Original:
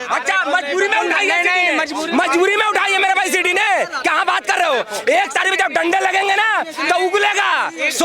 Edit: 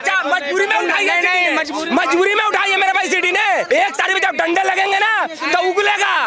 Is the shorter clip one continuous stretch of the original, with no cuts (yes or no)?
no